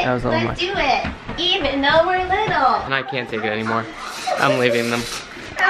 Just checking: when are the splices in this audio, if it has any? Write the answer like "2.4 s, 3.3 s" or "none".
2.9 s